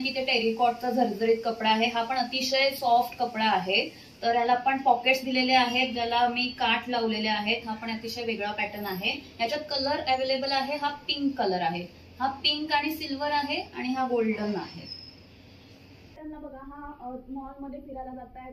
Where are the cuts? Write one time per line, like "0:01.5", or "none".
0:16.2